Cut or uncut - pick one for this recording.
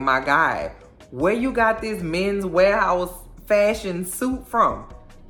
uncut